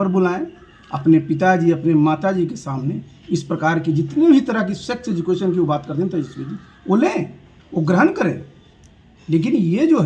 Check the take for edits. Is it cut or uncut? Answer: uncut